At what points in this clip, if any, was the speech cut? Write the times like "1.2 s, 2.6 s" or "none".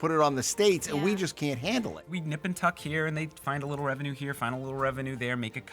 2.1 s